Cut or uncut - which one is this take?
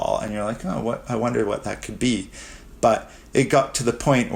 uncut